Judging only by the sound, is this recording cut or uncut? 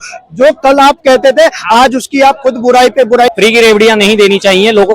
cut